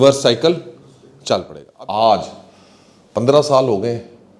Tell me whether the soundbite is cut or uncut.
cut